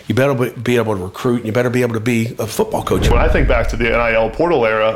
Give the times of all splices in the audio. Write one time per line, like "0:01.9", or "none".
0:03.1